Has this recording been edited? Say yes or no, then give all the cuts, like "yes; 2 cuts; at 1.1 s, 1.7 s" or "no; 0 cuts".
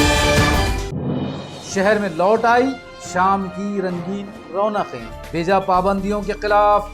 no; 0 cuts